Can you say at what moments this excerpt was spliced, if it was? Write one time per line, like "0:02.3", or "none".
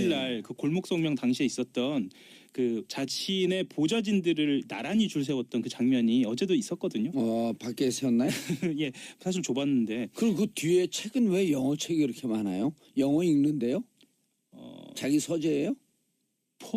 none